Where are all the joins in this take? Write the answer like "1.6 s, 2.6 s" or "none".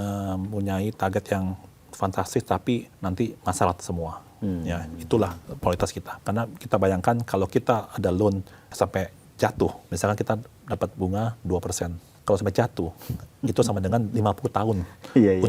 2.9 s, 6.1 s, 8.6 s, 9.8 s, 12.1 s